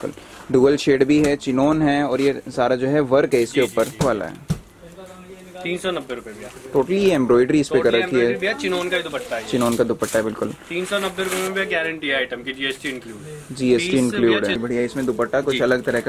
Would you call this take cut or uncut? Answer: cut